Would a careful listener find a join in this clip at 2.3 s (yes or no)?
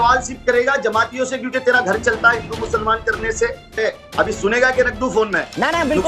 no